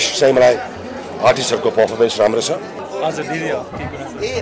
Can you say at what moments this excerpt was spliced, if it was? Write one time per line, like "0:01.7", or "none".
0:02.8